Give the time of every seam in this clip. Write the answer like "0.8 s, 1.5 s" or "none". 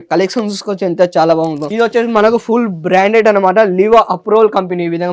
1.6 s